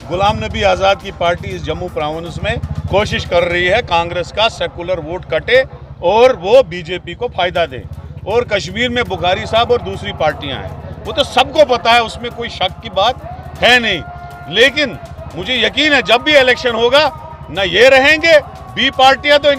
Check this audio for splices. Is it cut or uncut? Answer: uncut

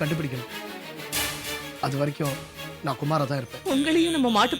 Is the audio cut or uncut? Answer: cut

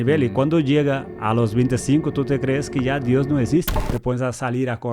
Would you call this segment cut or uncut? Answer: cut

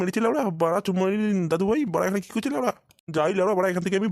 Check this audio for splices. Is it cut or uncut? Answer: uncut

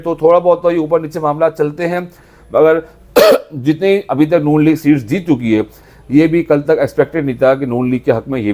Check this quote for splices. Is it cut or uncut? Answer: uncut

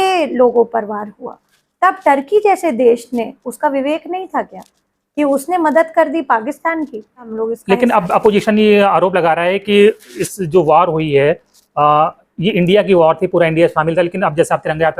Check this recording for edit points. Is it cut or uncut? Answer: cut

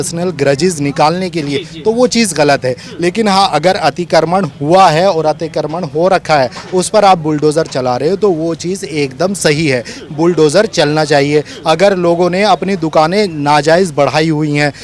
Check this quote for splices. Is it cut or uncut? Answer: uncut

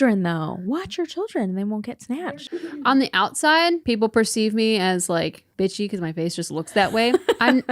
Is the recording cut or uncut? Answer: cut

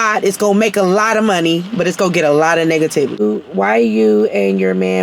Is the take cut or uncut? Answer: cut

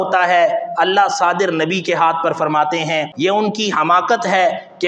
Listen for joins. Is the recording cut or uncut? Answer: cut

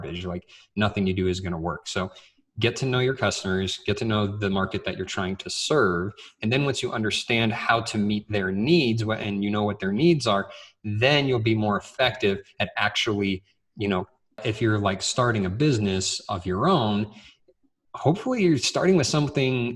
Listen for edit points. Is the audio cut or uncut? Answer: cut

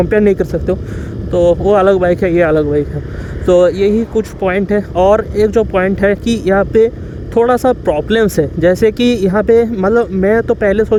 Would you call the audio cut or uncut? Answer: uncut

